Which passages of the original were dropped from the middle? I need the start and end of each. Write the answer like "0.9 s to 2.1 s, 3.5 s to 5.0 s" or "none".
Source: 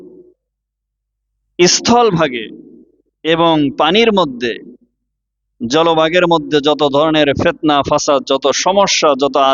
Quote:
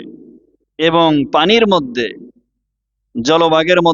none